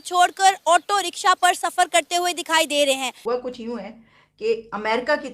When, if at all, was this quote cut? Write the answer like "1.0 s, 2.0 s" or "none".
3.1 s